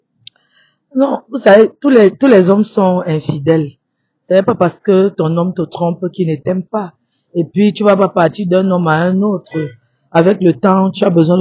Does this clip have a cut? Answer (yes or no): no